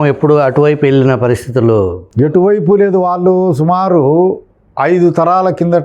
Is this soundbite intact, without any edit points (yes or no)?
yes